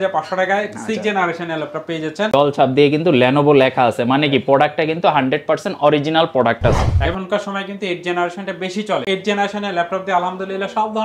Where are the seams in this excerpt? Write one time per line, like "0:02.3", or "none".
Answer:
0:02.3
0:06.9
0:09.0